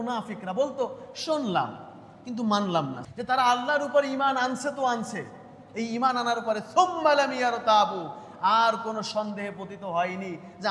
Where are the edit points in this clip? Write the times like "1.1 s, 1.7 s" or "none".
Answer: 3.0 s